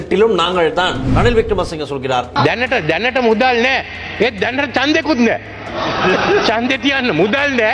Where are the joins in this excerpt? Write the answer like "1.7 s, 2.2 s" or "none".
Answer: 1.0 s, 2.3 s